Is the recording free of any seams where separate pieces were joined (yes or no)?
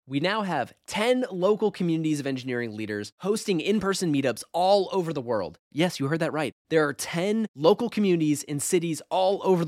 yes